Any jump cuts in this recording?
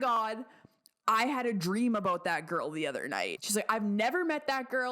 yes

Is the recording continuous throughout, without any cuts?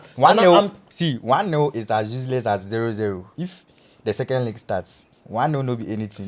no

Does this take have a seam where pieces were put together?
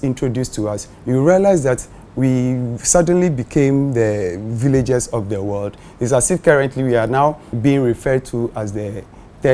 yes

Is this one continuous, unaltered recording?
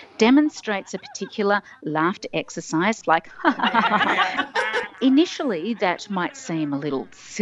no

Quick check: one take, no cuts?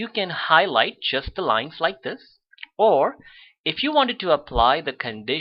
no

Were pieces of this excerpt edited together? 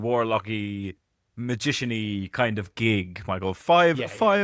no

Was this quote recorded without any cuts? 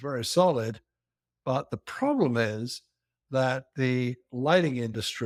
yes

